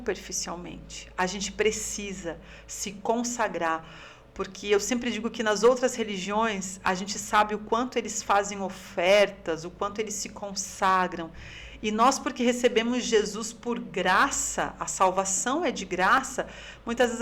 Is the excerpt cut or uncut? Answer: uncut